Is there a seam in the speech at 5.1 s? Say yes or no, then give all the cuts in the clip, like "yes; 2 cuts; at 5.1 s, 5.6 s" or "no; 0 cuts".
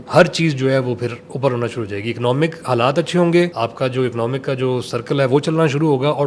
no; 1 cut; at 3.5 s